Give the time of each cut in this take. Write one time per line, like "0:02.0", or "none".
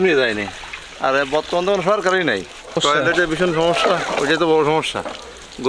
0:02.8